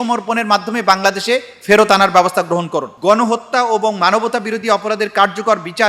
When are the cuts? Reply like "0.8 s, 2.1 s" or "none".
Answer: 2.9 s

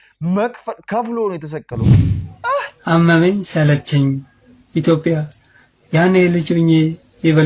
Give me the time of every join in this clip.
2.0 s

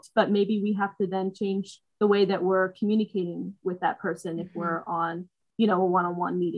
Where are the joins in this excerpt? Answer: none

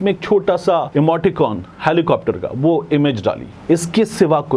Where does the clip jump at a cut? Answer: 0.9 s, 3.5 s

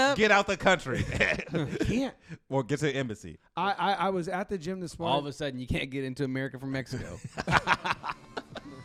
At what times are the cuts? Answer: none

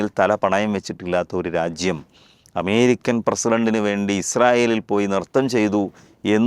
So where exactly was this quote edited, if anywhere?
none

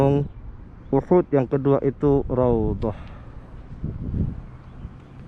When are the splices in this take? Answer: none

